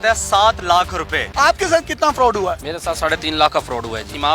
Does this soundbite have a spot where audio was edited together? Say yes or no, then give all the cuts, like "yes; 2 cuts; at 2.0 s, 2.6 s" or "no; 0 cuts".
yes; 1 cut; at 1.2 s